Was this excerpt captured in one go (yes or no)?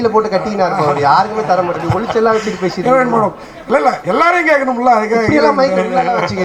yes